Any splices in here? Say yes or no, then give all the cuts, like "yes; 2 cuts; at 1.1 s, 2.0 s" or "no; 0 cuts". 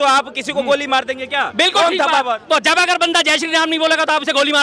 no; 0 cuts